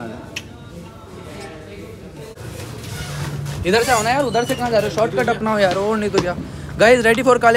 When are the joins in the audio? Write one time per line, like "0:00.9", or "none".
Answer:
0:02.4

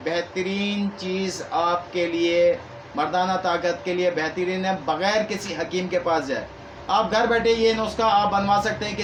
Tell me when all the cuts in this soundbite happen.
none

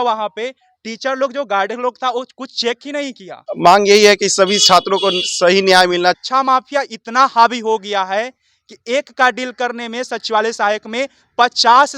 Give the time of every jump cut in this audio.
0:03.6
0:06.2

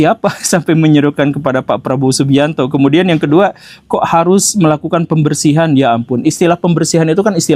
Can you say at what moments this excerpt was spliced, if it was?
none

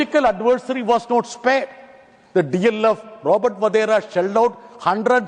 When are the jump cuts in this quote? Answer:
none

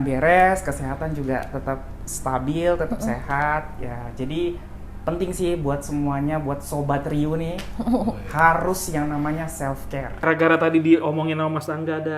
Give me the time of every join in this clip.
0:10.2

